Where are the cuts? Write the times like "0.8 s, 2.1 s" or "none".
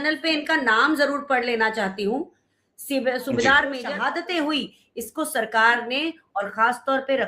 3.9 s